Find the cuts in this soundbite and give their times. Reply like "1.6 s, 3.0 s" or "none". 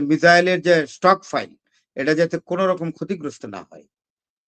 none